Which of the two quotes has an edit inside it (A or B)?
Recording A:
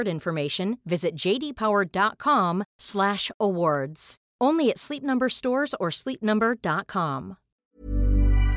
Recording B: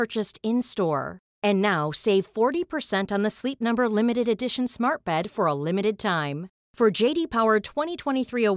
A